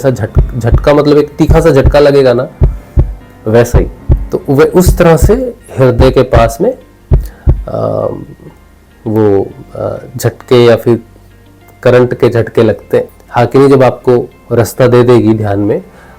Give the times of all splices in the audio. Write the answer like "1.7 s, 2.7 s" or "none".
13.2 s